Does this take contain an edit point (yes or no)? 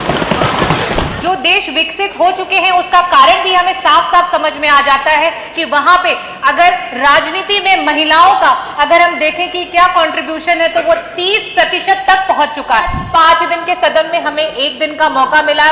yes